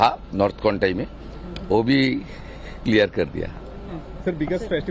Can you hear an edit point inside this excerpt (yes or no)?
no